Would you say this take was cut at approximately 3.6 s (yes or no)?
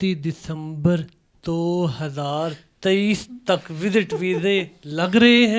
no